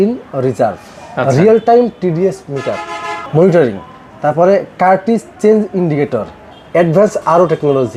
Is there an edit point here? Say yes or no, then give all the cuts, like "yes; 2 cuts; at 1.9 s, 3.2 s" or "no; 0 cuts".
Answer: no; 0 cuts